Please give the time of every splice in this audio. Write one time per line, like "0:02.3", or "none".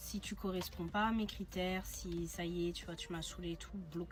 none